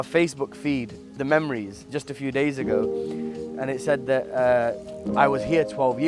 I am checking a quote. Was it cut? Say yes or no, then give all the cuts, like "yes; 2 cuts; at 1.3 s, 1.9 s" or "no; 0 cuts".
yes; 1 cut; at 1.2 s